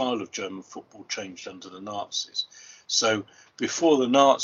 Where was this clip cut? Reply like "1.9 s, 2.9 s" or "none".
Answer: none